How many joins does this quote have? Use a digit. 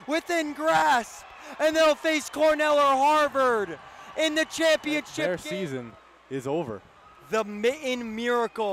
1